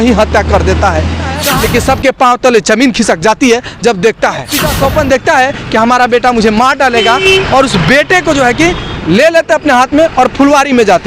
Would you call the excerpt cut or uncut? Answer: cut